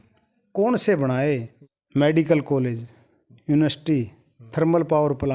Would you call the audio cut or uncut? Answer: cut